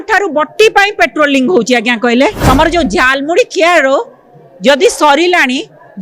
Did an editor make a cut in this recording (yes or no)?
yes